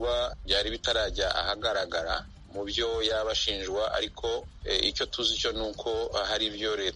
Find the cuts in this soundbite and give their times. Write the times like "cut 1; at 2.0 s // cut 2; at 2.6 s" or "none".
cut 1; at 4.5 s